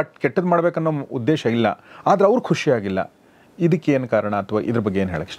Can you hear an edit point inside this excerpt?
no; 0 cuts

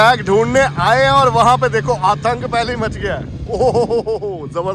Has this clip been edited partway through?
no; 0 cuts

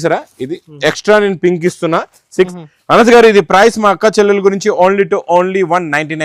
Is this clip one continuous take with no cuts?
no; 1 cut; at 2.5 s

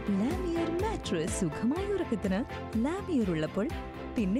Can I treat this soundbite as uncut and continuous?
yes; 0 cuts

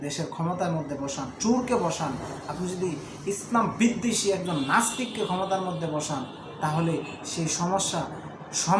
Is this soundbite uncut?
yes; 0 cuts

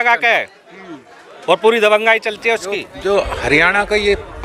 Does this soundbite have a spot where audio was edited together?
yes; 1 cut; at 2.9 s

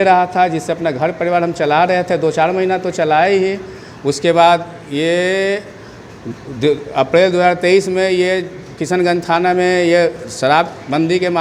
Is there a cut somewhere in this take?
no; 0 cuts

